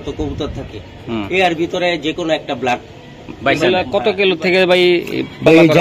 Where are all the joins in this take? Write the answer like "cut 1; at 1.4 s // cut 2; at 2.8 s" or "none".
cut 1; at 3.7 s

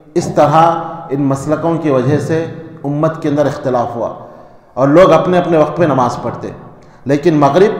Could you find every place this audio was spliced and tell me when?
none

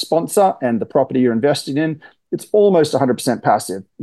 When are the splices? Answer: none

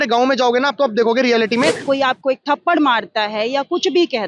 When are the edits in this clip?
cut 1; at 1.8 s

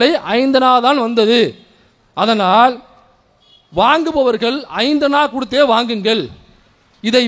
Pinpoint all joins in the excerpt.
none

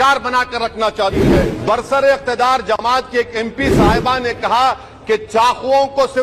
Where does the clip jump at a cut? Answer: cut 1; at 1.5 s

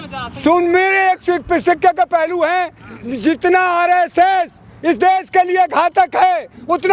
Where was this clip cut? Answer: none

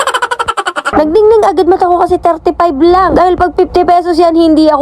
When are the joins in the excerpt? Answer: cut 1; at 0.9 s

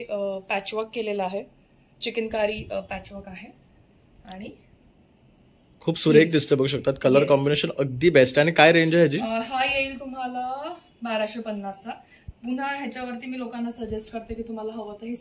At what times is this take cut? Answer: none

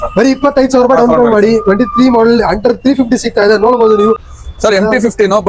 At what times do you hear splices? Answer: cut 1; at 4.3 s

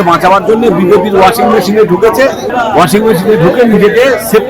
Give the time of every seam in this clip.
cut 1; at 2.5 s

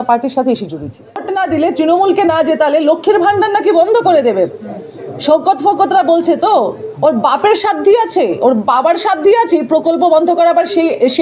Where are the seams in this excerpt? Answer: cut 1; at 1.2 s

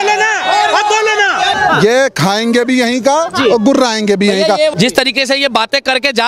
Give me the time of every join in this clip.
cut 1; at 1.6 s // cut 2; at 4.7 s

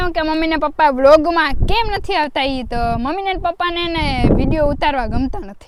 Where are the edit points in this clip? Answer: none

